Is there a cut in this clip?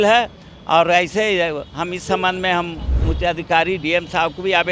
no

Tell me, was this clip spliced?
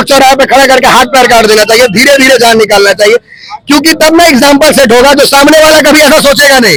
no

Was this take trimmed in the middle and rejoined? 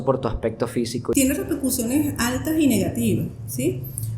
yes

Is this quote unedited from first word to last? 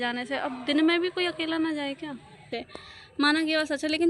no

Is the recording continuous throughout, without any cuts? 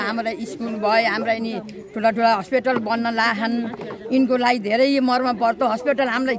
yes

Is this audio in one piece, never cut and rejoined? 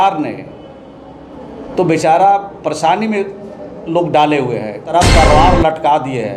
no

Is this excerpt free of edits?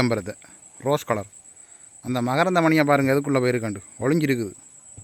yes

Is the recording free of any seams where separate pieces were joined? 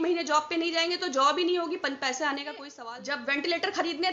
no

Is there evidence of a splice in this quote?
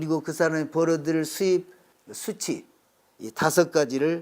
yes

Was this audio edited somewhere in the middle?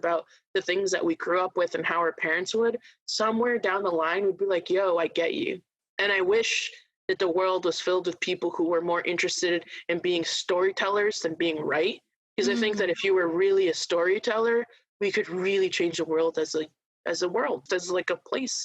yes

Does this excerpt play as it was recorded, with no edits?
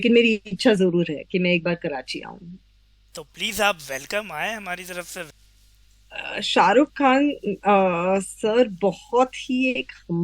no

